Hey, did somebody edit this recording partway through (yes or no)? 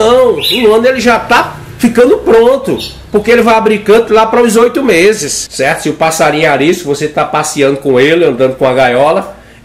yes